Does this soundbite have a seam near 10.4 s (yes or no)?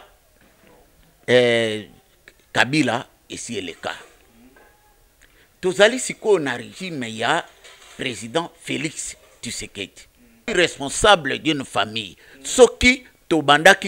yes